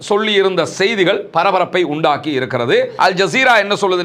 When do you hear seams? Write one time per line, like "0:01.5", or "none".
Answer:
0:02.9

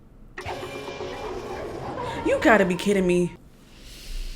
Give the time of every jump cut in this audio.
0:03.3

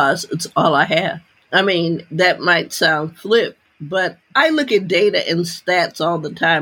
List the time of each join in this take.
0:01.3
0:04.2

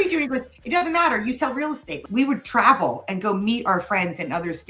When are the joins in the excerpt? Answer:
0:02.0

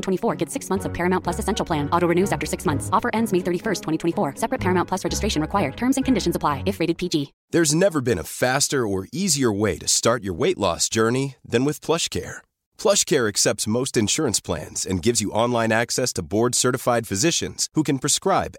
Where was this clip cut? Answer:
0:07.4

